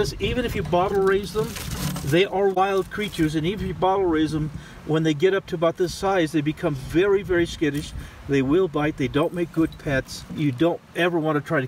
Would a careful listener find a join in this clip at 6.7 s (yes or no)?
no